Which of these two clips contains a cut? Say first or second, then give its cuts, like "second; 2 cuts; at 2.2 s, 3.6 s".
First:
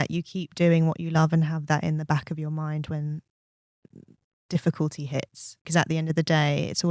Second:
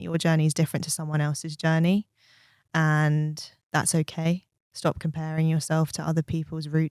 first; 1 cut; at 5.7 s